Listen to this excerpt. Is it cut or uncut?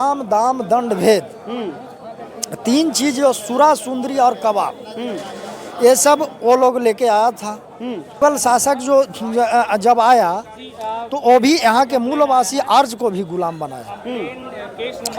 cut